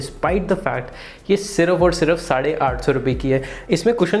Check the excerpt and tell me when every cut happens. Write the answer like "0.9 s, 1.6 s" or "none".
none